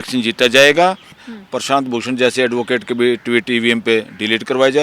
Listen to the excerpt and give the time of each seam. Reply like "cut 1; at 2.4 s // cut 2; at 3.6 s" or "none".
cut 1; at 1.2 s